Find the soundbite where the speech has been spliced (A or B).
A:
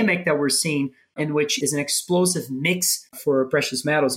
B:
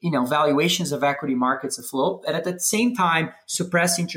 A